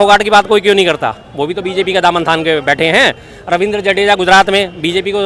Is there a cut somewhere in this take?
no; 0 cuts

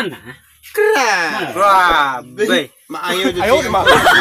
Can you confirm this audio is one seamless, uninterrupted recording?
yes; 0 cuts

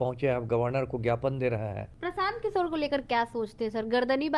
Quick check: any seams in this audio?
yes; 1 cut; at 1.9 s

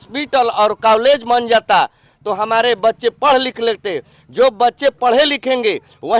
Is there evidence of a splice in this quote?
no; 0 cuts

